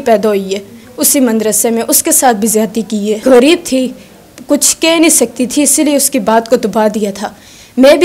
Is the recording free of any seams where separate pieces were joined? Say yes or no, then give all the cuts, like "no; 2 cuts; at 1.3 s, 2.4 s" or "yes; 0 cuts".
no; 1 cut; at 3.2 s